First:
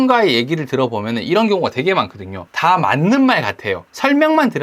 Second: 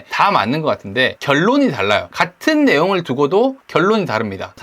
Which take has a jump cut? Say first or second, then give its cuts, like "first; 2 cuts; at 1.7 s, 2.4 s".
second; 3 cuts; at 1.2 s, 2.1 s, 3.6 s